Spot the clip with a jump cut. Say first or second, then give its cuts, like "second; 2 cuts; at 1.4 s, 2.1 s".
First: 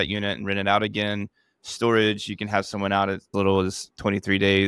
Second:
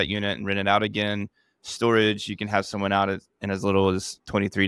first; 1 cut; at 3.3 s